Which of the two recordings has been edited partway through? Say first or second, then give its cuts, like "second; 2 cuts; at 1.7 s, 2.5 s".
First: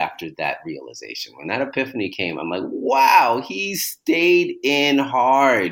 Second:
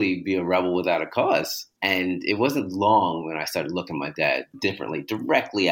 second; 2 cuts; at 1.6 s, 4.6 s